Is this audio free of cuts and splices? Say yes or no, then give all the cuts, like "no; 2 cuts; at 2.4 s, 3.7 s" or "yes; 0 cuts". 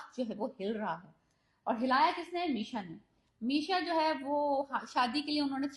yes; 0 cuts